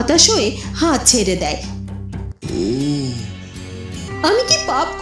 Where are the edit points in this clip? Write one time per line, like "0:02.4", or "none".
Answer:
0:04.0

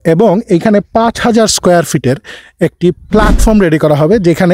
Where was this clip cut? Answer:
0:03.0

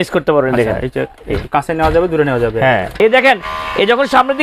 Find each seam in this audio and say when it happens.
0:02.9

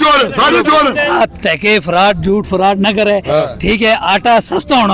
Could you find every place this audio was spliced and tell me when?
0:01.1

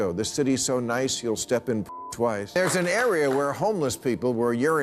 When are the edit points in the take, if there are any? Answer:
0:02.6

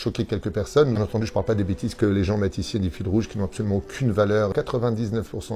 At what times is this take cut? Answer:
0:01.0
0:04.5

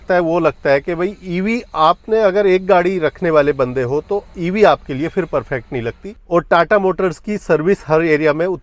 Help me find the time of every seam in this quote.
0:06.2

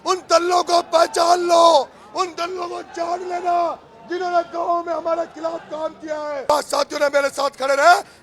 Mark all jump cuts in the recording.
0:06.5

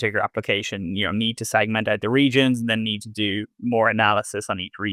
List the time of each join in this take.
none

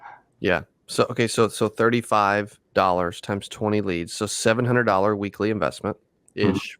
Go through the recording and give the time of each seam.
0:02.6

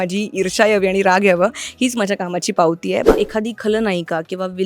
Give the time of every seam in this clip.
0:03.1

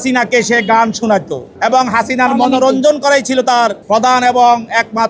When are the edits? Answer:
0:01.4
0:03.8

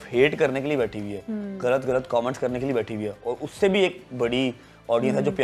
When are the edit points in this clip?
none

